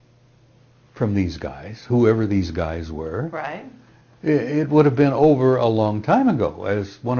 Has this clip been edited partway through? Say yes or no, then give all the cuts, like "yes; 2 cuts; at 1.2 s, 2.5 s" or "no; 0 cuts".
no; 0 cuts